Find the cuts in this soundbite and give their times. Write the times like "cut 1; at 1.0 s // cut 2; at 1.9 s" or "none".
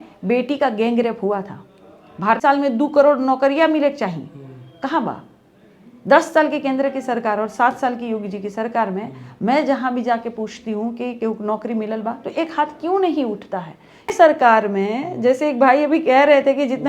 cut 1; at 2.4 s // cut 2; at 14.1 s